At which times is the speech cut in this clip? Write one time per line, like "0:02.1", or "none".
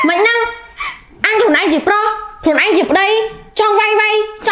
none